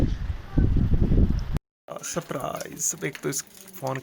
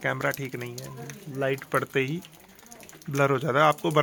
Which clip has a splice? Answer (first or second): first